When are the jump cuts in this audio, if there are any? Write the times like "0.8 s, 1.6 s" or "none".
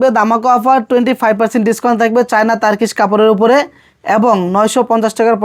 none